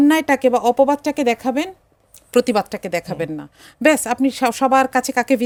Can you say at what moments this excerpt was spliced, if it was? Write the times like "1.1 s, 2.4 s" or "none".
none